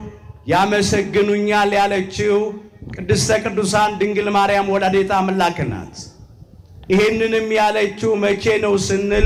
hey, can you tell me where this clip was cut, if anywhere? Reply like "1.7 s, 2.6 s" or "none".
none